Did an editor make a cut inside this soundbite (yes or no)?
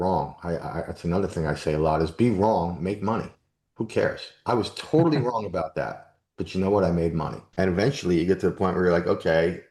yes